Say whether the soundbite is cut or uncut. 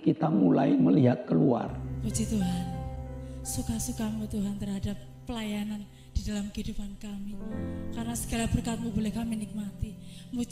cut